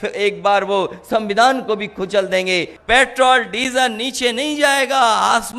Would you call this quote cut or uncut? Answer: cut